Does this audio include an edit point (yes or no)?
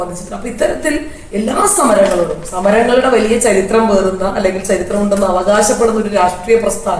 no